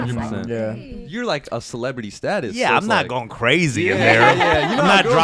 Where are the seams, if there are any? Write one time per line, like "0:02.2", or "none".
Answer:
0:01.0